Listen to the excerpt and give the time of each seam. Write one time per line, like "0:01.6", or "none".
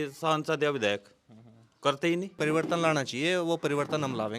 0:02.3